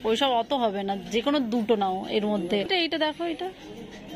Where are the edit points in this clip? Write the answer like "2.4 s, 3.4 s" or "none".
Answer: 2.7 s